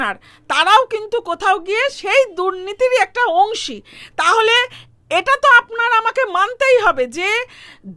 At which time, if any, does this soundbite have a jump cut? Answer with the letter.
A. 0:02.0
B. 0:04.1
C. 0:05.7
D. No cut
D